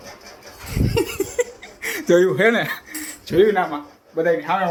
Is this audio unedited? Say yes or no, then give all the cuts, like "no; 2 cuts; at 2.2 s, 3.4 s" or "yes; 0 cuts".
yes; 0 cuts